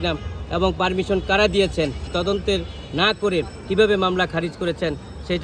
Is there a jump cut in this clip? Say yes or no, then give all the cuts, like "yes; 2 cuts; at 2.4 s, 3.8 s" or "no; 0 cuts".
yes; 1 cut; at 2.1 s